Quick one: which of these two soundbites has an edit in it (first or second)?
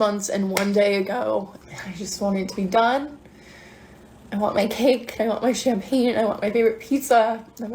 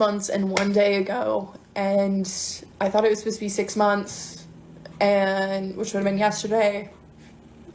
first